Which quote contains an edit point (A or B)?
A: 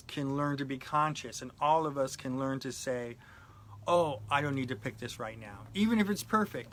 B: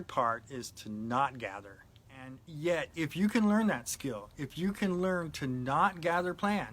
B